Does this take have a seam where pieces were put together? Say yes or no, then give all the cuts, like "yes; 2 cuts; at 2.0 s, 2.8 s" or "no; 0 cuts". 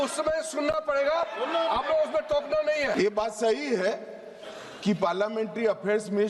yes; 1 cut; at 2.9 s